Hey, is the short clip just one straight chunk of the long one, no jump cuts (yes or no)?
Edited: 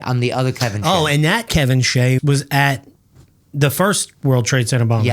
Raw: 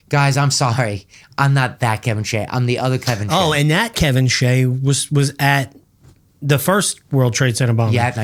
no